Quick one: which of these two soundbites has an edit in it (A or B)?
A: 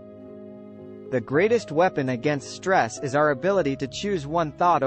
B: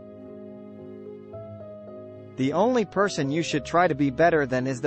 A